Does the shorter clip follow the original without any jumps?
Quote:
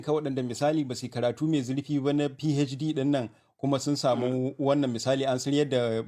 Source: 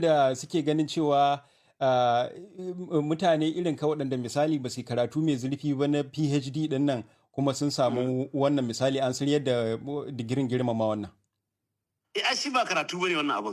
yes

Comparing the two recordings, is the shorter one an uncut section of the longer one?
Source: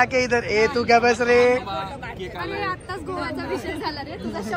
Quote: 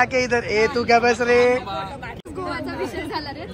no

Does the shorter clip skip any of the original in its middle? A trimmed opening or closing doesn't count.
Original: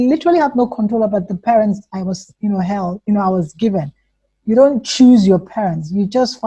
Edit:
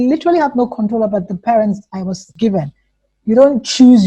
yes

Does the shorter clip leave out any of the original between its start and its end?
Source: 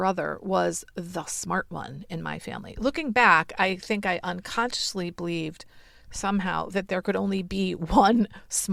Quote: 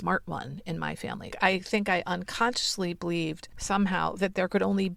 yes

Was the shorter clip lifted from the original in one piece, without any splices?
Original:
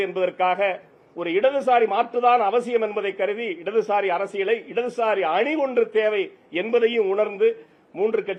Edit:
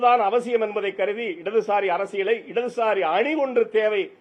yes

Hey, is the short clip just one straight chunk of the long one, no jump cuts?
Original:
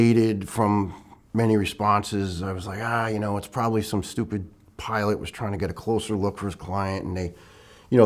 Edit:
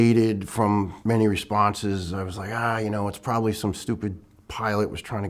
no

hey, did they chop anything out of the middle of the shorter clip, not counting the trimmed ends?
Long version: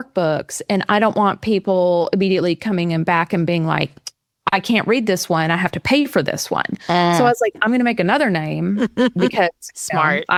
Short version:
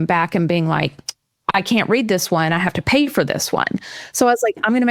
no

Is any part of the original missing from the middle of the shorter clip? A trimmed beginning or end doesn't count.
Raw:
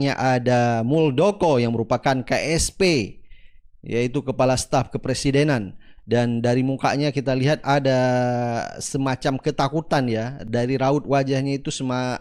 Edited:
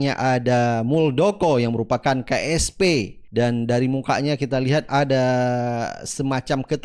yes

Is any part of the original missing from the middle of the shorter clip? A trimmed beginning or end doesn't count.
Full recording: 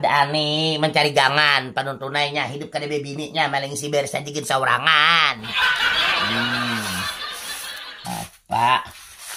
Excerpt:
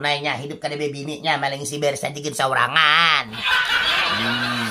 no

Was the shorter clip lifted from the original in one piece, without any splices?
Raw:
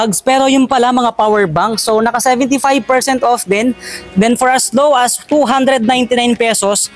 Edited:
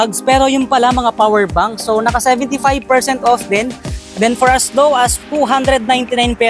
yes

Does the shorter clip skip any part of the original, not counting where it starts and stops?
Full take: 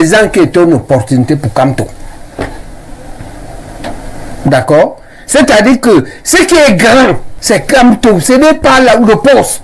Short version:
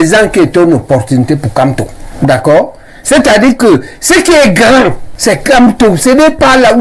yes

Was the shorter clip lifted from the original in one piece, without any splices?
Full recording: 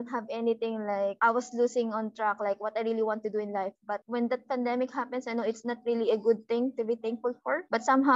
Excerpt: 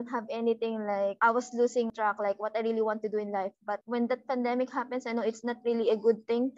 no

